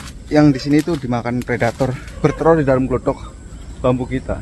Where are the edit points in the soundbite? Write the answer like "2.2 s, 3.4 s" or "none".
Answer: 2.1 s

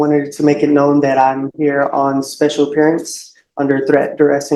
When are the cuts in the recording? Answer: none

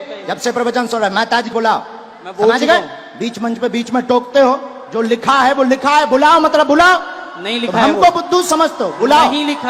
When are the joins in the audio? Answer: 1.5 s

